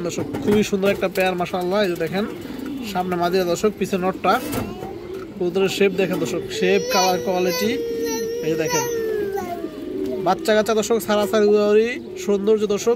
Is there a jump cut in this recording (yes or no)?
no